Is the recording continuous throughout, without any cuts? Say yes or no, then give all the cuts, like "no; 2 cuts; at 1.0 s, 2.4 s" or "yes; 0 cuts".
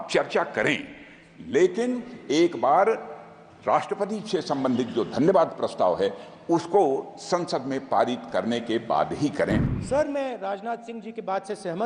no; 1 cut; at 9.7 s